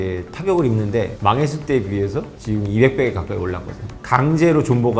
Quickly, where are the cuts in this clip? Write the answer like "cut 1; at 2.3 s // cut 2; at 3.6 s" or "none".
cut 1; at 1.1 s // cut 2; at 3.9 s